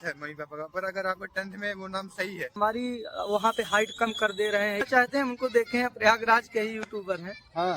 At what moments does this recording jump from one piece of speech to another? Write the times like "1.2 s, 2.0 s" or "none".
2.5 s, 4.8 s